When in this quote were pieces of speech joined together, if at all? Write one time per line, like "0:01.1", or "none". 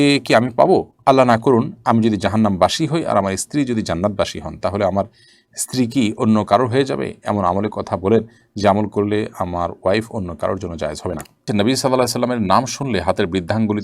0:11.5